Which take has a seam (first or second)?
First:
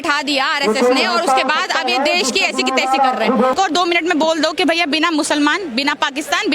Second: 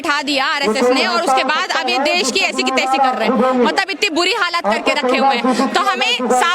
first